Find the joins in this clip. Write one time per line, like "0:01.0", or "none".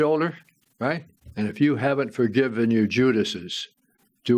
0:01.2